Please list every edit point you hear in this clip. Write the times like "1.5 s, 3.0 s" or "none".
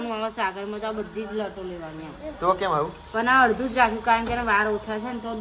none

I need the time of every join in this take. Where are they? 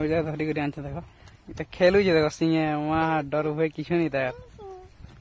none

